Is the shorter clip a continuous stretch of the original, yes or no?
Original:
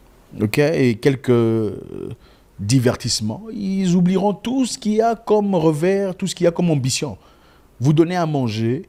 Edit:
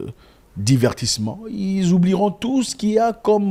yes